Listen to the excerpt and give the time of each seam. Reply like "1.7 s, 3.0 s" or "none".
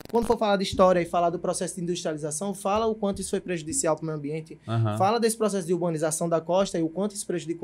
none